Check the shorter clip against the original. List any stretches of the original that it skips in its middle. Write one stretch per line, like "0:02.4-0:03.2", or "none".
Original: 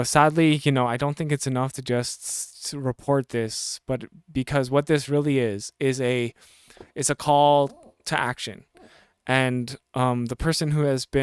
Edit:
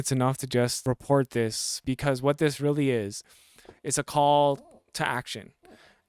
0:02.1-0:02.8
0:03.7-0:04.2
0:05.7-0:06.3